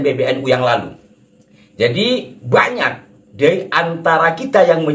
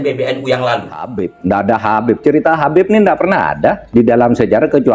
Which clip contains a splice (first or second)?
second